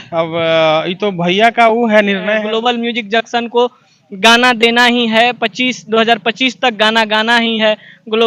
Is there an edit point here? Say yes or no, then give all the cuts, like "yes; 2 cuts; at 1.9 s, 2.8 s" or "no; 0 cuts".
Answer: yes; 1 cut; at 2.2 s